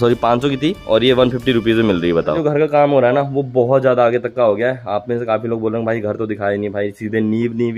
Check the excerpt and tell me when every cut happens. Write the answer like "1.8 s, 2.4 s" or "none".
2.4 s